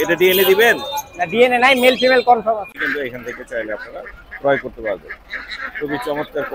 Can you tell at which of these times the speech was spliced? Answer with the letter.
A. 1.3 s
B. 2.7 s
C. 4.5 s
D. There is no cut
B